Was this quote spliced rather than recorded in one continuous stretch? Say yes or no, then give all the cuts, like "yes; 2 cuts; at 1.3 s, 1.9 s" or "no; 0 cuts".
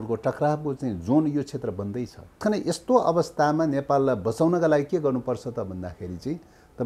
yes; 1 cut; at 2.4 s